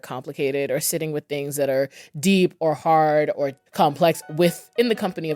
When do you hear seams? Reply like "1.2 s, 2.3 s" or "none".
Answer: 3.6 s

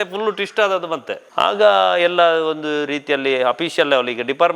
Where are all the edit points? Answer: 1.2 s

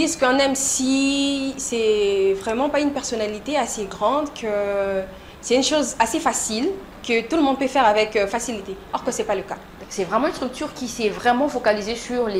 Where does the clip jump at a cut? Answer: 9.8 s

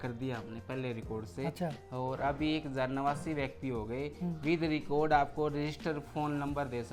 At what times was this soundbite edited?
none

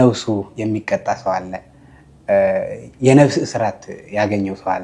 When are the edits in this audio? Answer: none

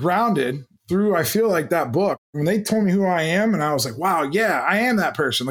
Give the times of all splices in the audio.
2.2 s

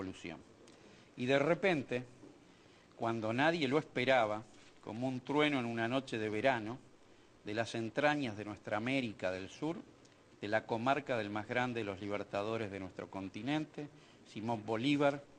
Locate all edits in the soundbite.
2.6 s

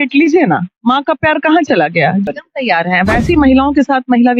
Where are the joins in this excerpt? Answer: 2.2 s

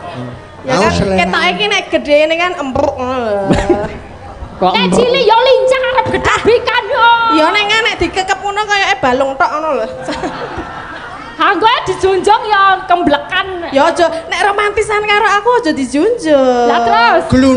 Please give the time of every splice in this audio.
none

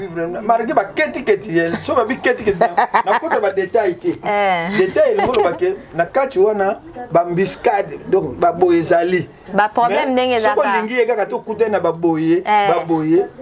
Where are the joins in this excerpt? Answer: none

